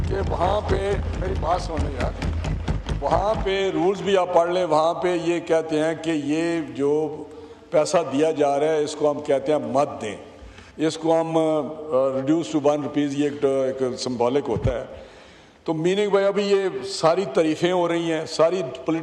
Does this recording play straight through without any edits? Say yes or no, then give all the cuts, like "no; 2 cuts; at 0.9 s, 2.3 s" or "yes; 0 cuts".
yes; 0 cuts